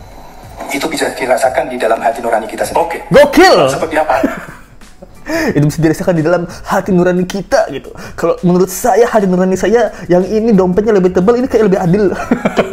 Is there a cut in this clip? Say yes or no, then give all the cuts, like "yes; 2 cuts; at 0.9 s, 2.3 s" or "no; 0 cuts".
no; 0 cuts